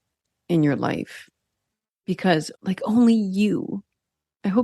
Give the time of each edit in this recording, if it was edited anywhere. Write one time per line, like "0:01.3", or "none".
0:02.5